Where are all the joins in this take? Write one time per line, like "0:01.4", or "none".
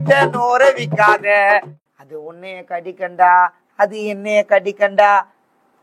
0:01.8